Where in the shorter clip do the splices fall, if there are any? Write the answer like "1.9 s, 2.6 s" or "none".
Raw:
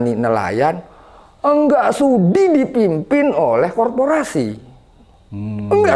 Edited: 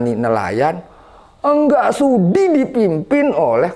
none